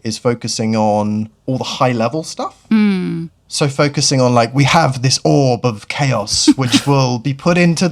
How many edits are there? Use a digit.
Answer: 0